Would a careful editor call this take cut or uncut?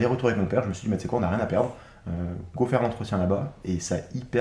uncut